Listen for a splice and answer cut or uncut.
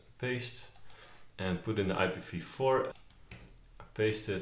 cut